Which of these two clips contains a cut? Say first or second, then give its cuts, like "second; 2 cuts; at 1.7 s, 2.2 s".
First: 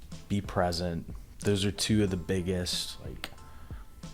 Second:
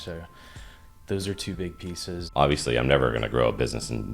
second; 1 cut; at 2.2 s